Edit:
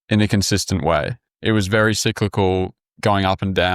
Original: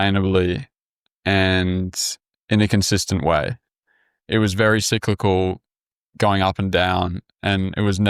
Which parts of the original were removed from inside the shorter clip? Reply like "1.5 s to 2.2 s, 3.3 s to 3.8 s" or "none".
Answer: 3.6 s to 4.1 s, 5.7 s to 6.0 s